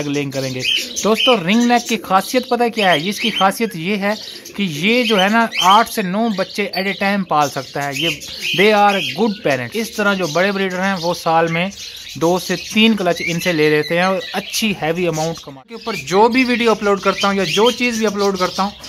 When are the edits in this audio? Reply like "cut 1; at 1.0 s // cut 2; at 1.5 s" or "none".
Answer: cut 1; at 9.7 s // cut 2; at 15.9 s